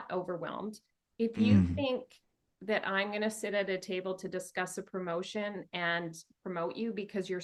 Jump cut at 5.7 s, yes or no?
no